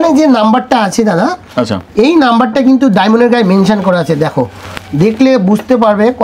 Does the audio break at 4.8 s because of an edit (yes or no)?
no